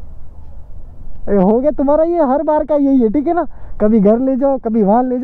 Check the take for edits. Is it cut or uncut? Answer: uncut